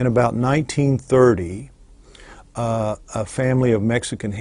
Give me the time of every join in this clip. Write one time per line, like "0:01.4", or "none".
0:03.1